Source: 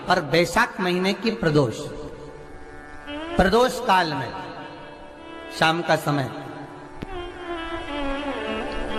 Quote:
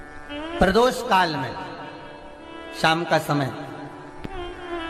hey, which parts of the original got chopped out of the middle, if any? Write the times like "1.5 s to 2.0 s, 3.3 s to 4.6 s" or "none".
none

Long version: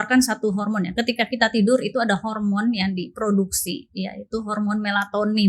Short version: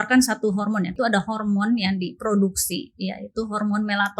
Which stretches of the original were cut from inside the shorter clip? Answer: 0.9 s to 1.9 s

